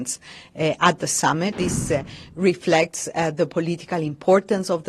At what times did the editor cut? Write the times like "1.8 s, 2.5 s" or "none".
1.5 s

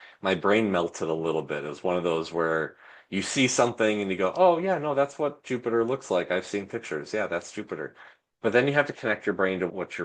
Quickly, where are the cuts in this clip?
8.9 s

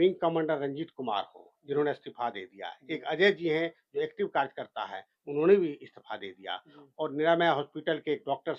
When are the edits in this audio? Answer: none

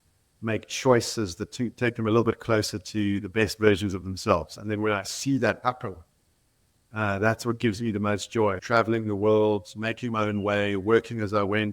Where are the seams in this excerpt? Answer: 8.6 s

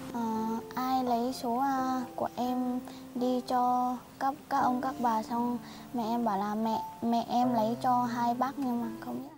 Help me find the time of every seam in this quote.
none

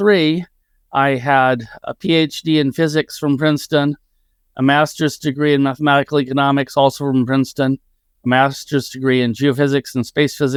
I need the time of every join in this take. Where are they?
none

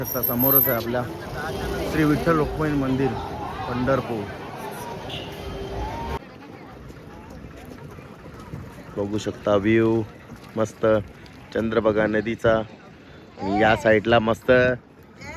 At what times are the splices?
6.2 s

